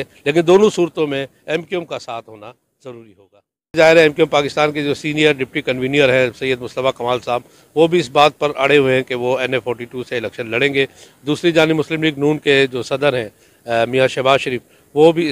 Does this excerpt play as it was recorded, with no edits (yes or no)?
no